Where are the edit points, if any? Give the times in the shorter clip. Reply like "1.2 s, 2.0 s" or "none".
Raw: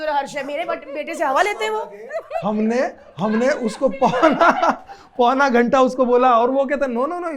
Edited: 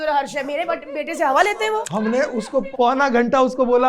2.4 s